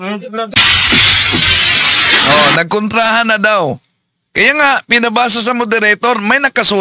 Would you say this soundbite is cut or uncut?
uncut